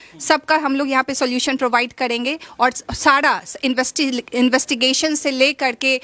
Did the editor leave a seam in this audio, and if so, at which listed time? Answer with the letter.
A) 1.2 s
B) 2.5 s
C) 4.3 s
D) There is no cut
D